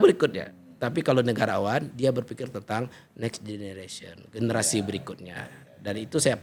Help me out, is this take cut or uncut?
uncut